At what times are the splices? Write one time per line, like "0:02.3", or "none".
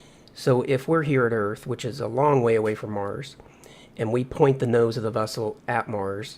0:02.8